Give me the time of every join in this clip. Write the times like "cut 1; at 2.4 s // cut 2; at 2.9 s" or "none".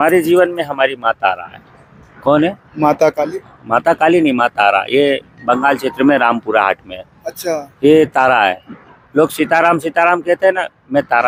none